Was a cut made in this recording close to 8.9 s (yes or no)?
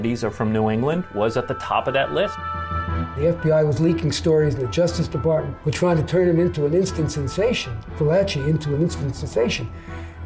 no